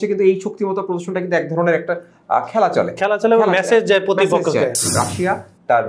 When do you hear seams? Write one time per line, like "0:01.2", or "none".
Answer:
0:04.8